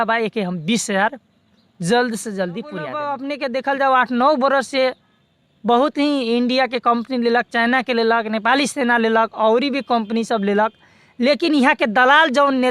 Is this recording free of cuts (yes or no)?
no